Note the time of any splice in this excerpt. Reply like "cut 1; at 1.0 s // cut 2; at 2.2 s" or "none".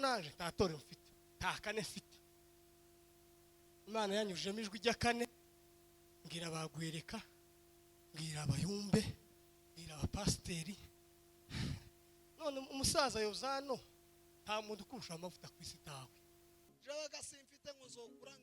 cut 1; at 16.8 s

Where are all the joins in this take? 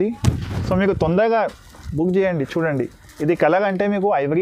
none

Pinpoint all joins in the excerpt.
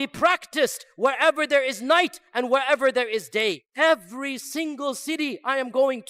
cut 1; at 3.7 s

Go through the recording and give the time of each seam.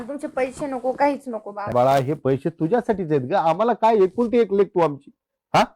cut 1; at 1.7 s

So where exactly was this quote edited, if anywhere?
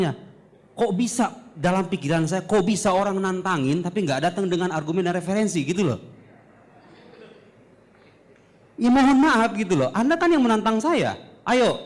none

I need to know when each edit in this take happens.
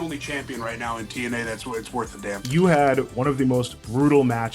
cut 1; at 2.4 s // cut 2; at 3.6 s

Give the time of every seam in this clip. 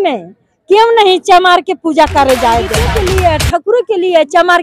cut 1; at 2.8 s

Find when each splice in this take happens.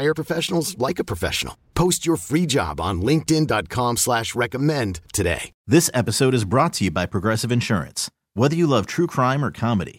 cut 1; at 5.5 s

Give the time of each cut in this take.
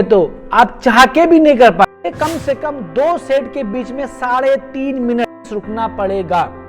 cut 1; at 1.8 s // cut 2; at 5.5 s

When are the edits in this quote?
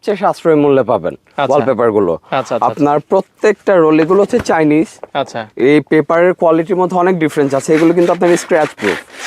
none

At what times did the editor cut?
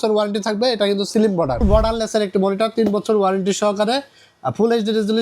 cut 1; at 1.6 s

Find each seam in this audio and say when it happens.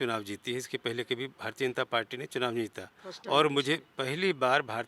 none

